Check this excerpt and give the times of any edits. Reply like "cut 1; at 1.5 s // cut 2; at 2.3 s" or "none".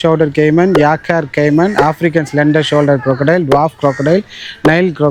none